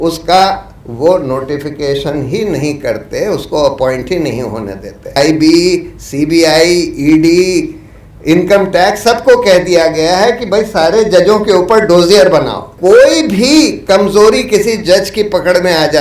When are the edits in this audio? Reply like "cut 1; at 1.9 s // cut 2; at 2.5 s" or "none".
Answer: cut 1; at 5.2 s // cut 2; at 12.7 s